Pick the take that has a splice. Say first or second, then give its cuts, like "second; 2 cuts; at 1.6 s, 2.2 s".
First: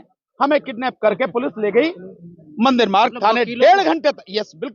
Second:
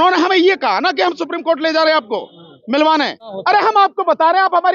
second; 1 cut; at 3.3 s